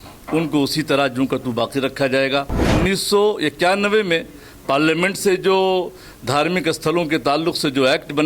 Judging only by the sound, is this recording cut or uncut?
cut